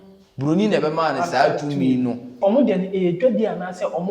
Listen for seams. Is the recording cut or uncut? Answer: cut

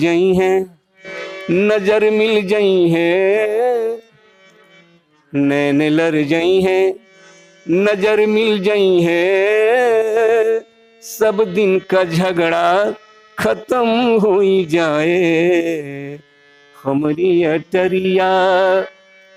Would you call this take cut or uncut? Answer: uncut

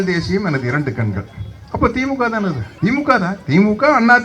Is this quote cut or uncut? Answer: cut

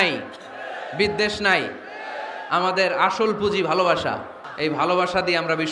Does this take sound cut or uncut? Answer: cut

